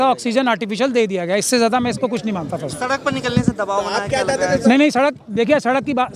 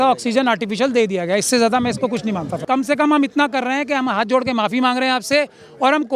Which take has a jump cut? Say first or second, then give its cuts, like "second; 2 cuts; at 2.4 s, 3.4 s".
second; 1 cut; at 2.6 s